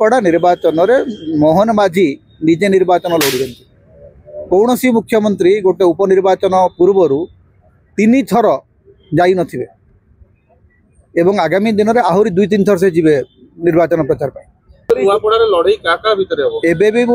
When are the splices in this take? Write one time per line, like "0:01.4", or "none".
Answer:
0:14.9